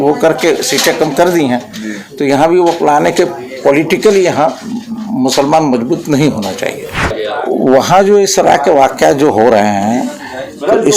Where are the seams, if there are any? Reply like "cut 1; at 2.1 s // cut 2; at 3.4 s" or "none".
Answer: cut 1; at 7.1 s